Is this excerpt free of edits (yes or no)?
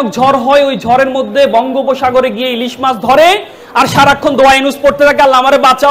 yes